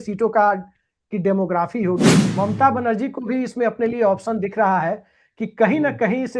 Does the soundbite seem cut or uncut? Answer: cut